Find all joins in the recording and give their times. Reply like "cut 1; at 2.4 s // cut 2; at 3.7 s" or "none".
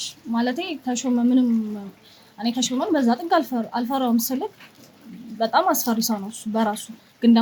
none